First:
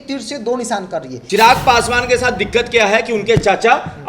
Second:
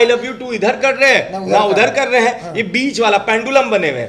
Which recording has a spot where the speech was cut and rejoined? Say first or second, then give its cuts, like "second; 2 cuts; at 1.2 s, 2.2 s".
first; 1 cut; at 1.1 s